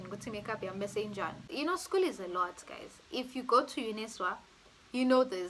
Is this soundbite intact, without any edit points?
no; 1 cut; at 1.4 s

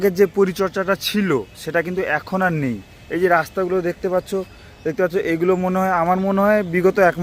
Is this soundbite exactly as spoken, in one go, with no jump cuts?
yes; 0 cuts

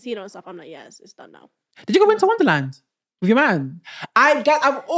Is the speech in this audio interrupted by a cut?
yes; 1 cut; at 1.7 s

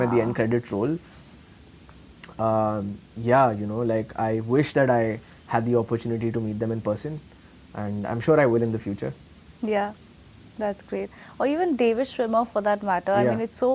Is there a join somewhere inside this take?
no; 0 cuts

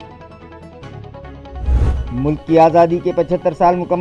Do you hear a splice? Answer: no; 0 cuts

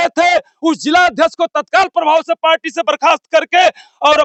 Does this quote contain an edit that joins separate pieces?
no; 0 cuts

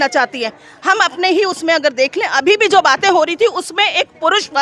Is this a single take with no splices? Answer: yes; 0 cuts

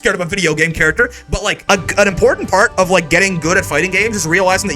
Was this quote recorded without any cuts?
no; 1 cut; at 1.6 s

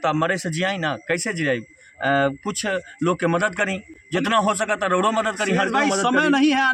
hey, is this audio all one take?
yes; 0 cuts

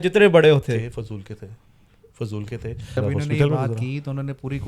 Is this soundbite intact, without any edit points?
no; 1 cut; at 3.0 s

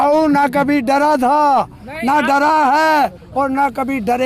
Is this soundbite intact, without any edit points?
yes; 0 cuts

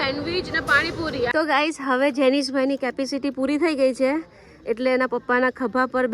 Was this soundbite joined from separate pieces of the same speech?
yes; 1 cut; at 1.3 s

